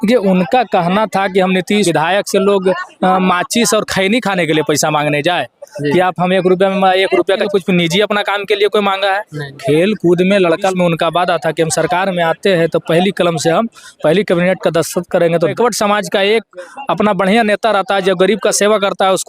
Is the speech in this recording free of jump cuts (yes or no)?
no